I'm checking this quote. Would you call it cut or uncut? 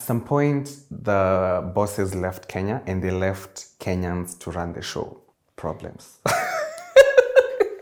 uncut